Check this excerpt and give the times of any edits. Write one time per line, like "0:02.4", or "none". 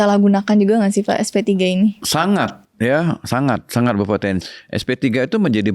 0:04.4

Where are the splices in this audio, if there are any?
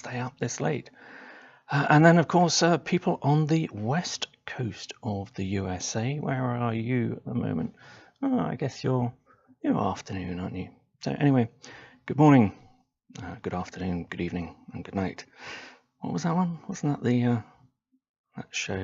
0:02.7

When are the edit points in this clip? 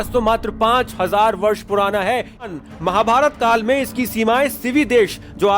0:02.4

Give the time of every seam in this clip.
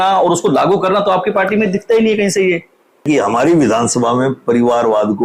0:03.0

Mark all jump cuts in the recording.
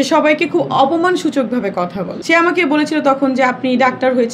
0:02.1

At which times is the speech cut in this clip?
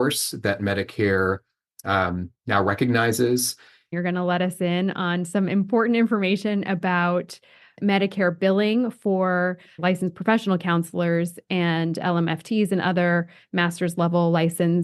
0:03.9

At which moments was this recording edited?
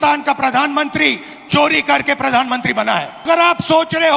0:03.3

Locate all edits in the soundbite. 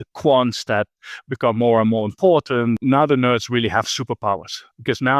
0:02.8

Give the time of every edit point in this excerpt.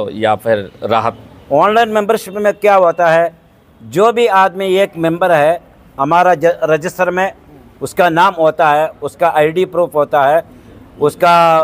0:01.3

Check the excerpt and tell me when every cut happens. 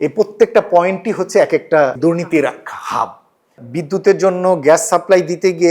0:02.0
0:03.6

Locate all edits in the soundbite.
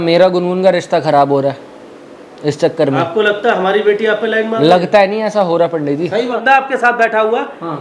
0:06.4

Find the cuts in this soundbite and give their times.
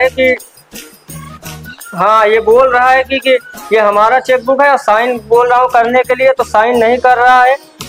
none

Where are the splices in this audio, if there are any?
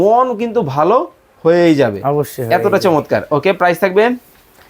none

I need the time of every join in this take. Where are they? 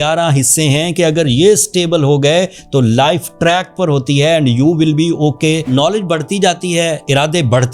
0:05.7

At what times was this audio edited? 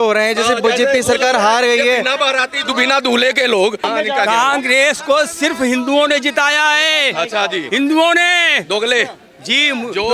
0:03.8

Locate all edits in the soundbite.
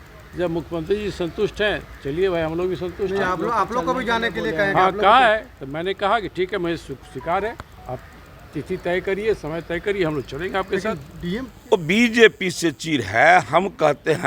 0:11.6

